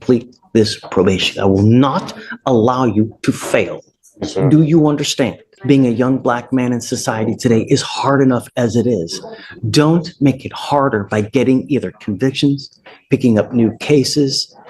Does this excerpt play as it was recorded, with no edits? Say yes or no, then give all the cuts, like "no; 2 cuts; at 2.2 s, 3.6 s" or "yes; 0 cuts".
no; 1 cut; at 5.5 s